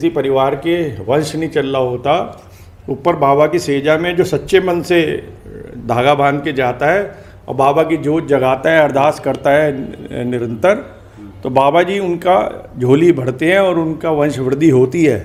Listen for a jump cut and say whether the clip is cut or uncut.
uncut